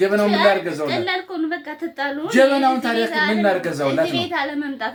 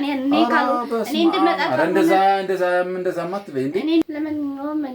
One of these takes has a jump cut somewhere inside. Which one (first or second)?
second